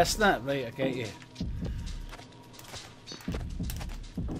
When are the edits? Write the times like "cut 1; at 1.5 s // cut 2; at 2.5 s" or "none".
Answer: none

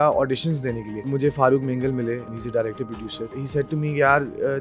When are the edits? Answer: cut 1; at 1.1 s // cut 2; at 2.3 s // cut 3; at 3.4 s

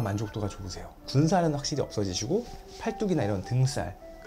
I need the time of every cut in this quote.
cut 1; at 1.0 s

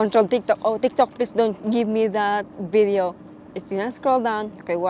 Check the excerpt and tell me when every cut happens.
none

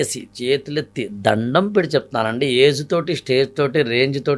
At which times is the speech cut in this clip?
none

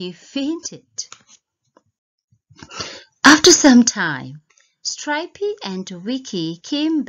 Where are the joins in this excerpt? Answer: none

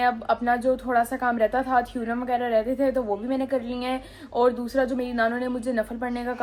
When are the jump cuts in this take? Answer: none

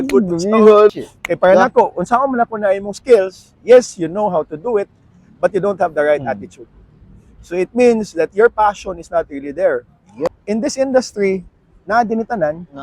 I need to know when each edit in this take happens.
cut 1; at 0.9 s // cut 2; at 10.4 s

